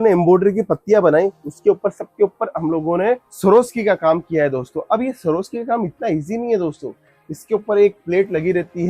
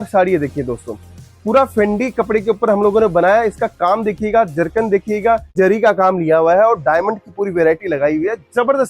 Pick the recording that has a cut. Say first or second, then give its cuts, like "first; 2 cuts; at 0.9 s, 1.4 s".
second; 1 cut; at 5.5 s